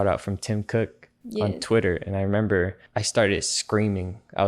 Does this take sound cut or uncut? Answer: uncut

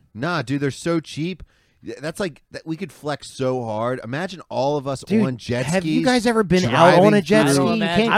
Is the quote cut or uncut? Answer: uncut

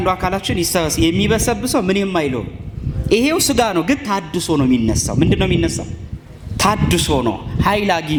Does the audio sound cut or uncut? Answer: uncut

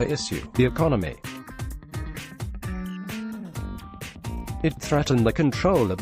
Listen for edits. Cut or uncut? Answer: cut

